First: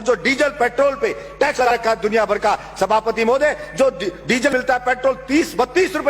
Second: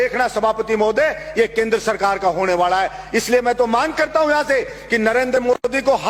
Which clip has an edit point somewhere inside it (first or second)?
first